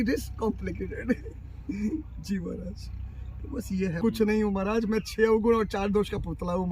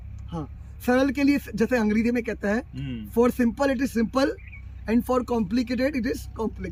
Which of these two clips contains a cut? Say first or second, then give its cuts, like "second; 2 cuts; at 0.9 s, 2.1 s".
first; 1 cut; at 4.0 s